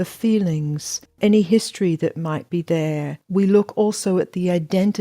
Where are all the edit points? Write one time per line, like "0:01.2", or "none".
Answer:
0:01.2
0:03.2

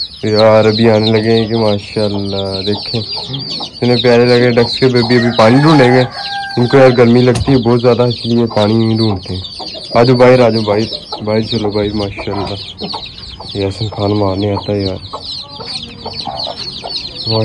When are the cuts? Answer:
none

